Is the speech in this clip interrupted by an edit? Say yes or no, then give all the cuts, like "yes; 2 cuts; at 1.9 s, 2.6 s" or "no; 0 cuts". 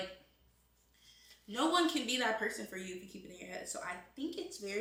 no; 0 cuts